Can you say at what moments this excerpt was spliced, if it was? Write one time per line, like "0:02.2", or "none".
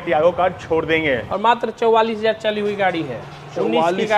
0:01.3